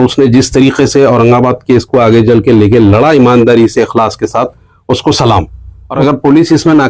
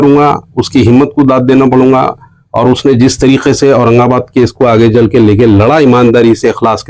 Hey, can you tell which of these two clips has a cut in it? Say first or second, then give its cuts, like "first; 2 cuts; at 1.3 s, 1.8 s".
first; 1 cut; at 5.8 s